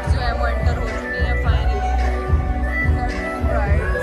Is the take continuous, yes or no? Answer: yes